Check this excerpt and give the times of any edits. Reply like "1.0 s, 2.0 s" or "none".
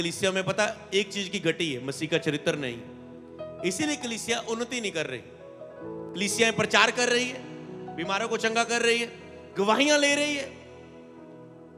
none

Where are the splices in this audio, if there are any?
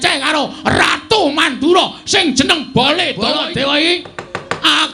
3.3 s

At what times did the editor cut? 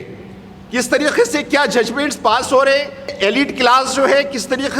3.1 s

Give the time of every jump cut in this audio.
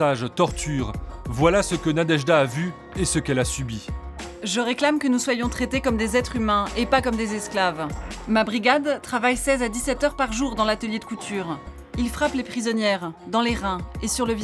8.1 s, 11.8 s

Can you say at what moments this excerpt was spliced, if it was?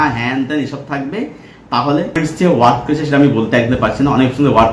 2.2 s

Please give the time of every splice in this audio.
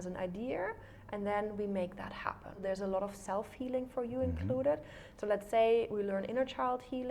2.6 s

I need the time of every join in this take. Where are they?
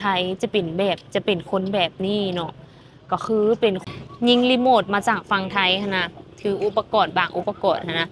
3.8 s

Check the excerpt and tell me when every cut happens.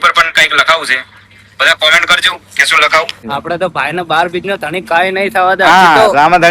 3.2 s

